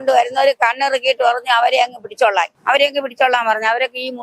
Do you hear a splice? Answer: yes; 1 cut; at 2.5 s

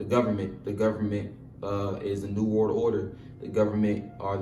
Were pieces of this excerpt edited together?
no; 0 cuts

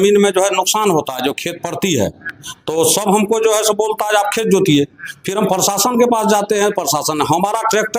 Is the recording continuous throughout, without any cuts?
yes; 0 cuts

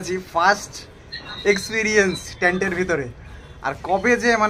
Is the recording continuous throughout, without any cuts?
yes; 0 cuts

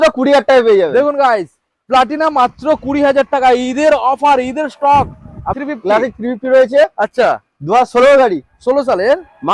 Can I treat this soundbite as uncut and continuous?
no; 1 cut; at 5.5 s

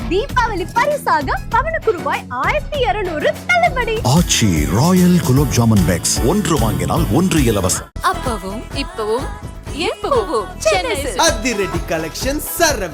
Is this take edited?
no; 0 cuts

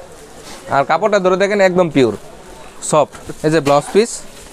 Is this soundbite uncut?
no; 1 cut; at 3.2 s

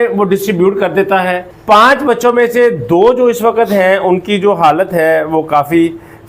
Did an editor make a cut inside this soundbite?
yes; 1 cut; at 1.5 s

